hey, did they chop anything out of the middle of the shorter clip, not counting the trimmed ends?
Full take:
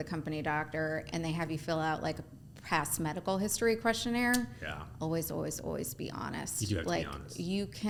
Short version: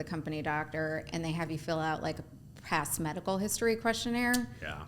no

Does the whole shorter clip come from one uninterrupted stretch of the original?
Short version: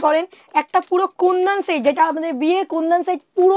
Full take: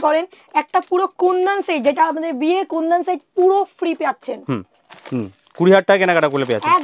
yes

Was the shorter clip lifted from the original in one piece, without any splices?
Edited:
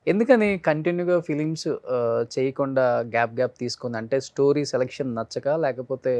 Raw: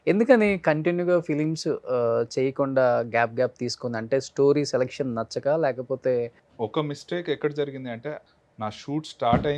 yes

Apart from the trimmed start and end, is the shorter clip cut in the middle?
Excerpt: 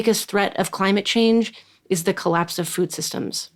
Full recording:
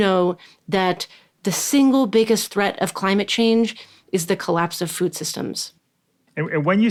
no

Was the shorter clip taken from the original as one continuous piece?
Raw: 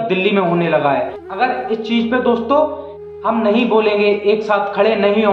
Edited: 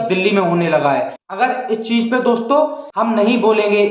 no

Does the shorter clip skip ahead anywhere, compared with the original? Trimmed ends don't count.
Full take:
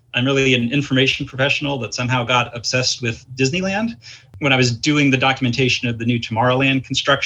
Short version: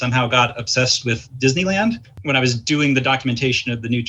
yes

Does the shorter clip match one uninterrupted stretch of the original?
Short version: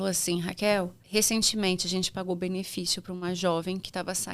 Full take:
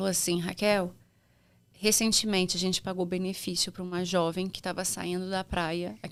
no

